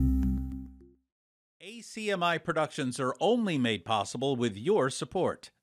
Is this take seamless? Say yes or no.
no